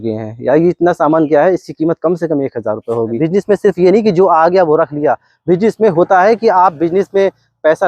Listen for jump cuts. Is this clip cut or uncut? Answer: cut